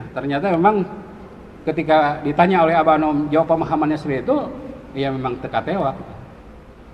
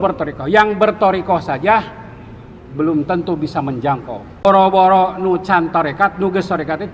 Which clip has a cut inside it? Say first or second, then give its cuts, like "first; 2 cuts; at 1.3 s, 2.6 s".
second; 1 cut; at 4.4 s